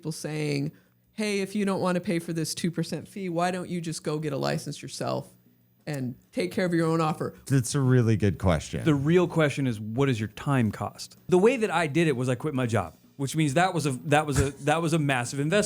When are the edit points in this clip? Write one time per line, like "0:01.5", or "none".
0:07.3
0:11.2